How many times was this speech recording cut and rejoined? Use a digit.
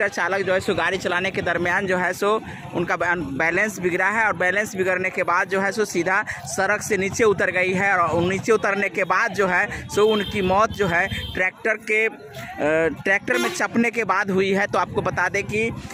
0